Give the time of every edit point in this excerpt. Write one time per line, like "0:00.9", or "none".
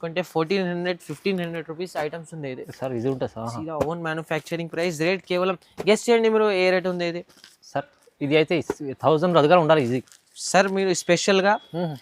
none